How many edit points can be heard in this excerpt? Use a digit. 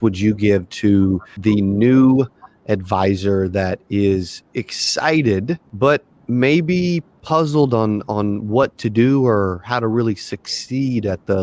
3